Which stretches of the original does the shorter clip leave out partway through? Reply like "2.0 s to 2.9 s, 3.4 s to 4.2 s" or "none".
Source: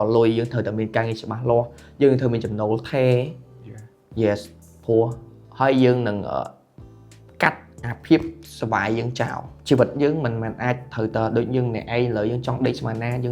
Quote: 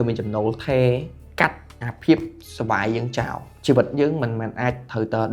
3.4 s to 7.2 s